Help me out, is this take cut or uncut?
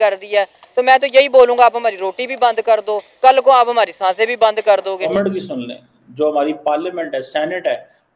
cut